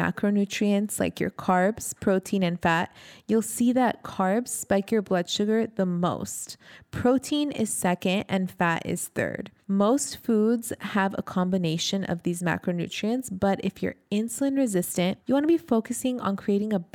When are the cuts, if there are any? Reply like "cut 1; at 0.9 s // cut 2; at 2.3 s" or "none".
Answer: cut 1; at 9.5 s // cut 2; at 15.2 s